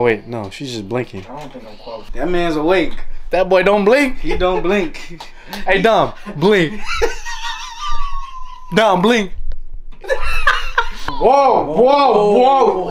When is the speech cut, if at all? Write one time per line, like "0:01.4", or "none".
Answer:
0:02.1
0:11.1